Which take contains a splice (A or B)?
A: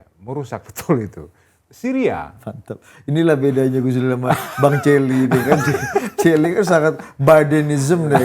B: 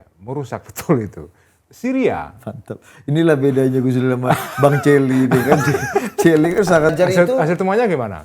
B